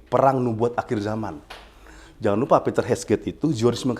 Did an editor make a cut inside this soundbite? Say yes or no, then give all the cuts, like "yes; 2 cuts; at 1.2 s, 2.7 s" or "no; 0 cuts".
no; 0 cuts